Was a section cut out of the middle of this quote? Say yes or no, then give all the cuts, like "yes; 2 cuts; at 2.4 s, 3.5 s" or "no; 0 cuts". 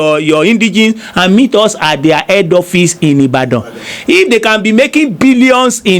no; 0 cuts